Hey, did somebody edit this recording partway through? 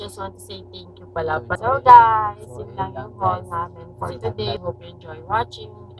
yes; 2 cuts; at 1.6 s, 4.6 s

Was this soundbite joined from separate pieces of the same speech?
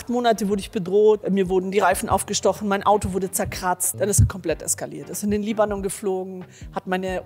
yes; 2 cuts; at 1.2 s, 3.9 s

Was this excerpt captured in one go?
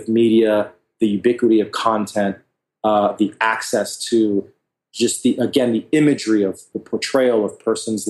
no; 1 cut; at 6.6 s

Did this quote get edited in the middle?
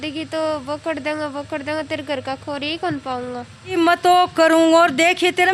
yes; 1 cut; at 3.8 s

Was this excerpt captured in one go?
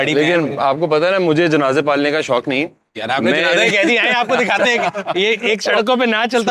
yes; 0 cuts

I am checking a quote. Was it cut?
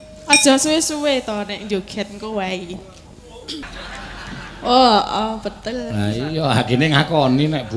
yes; 1 cut; at 3.7 s

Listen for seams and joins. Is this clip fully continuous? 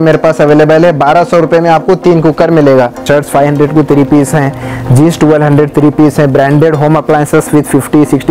no; 1 cut; at 3.0 s

